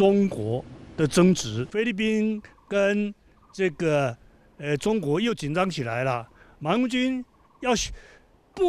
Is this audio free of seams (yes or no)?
no